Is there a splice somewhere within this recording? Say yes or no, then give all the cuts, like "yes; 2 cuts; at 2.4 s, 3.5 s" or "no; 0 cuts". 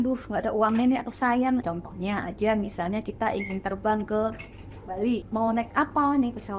yes; 2 cuts; at 1.6 s, 5.2 s